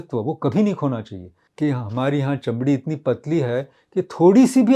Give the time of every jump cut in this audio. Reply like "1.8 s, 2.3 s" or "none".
1.4 s